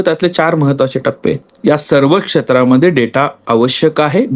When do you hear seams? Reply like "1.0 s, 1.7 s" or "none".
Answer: 1.5 s

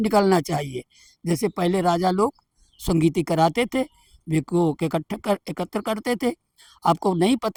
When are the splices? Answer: none

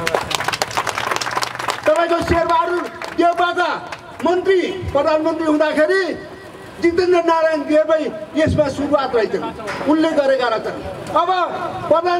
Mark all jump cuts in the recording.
none

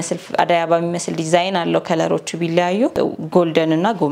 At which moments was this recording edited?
3.0 s

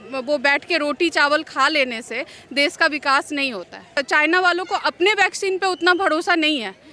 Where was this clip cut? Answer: 3.9 s

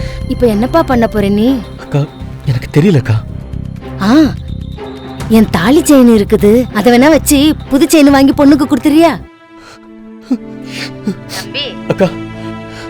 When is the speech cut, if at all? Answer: 1.7 s, 3.2 s, 9.2 s, 10.6 s

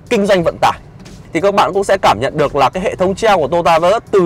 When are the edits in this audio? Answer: 1.2 s

